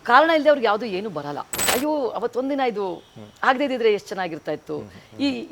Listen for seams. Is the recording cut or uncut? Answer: cut